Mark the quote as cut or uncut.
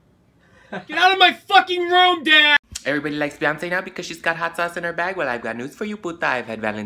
cut